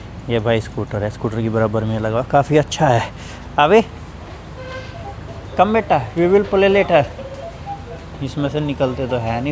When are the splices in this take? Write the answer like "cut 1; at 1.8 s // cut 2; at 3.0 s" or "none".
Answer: none